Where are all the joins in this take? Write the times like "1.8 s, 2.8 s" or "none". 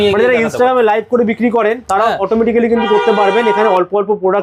none

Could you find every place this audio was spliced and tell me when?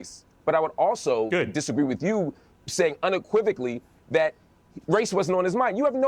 none

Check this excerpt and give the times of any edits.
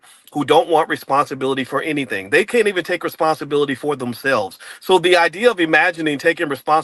2.5 s

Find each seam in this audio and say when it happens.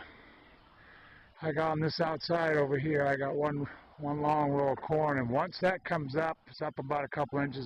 none

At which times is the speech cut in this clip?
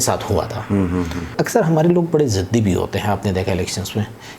1.3 s

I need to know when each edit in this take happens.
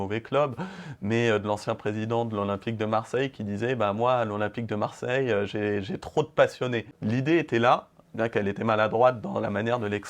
6.9 s

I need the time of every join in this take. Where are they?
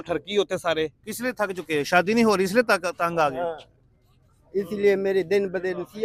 1.0 s

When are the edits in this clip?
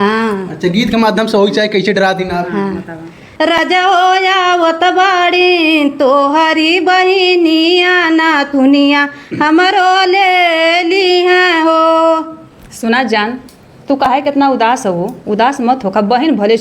3.2 s

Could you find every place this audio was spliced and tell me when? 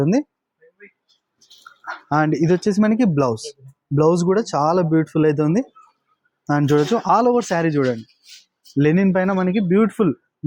none

